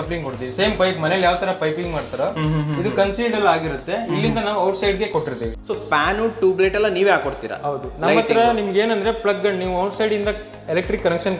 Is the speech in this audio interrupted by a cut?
yes; 1 cut; at 5.6 s

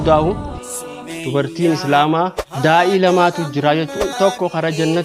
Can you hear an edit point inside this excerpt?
yes; 2 cuts; at 2.4 s, 4.1 s

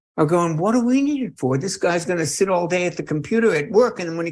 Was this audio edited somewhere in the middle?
no; 0 cuts

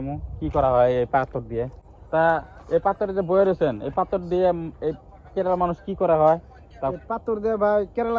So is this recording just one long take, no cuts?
yes; 0 cuts

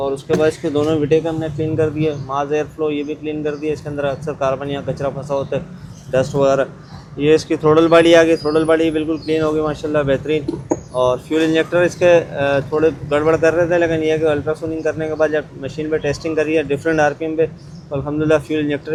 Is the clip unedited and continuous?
yes; 0 cuts

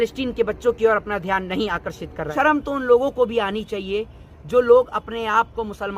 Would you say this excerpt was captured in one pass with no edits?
no; 1 cut; at 2.3 s

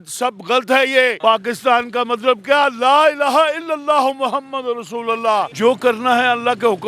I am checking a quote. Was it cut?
yes; 2 cuts; at 1.2 s, 5.5 s

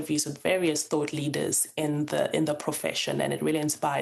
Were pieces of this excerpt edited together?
no; 0 cuts

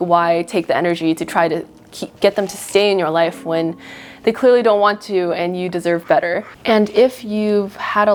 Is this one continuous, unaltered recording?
yes; 0 cuts

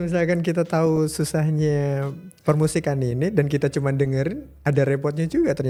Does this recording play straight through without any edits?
yes; 0 cuts

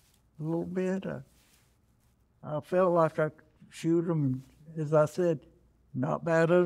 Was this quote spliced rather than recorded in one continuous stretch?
no; 0 cuts

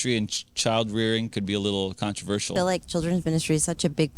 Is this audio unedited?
no; 1 cut; at 2.5 s

